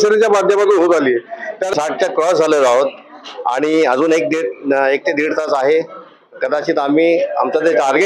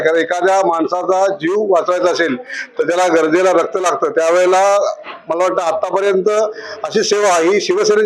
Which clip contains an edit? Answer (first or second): first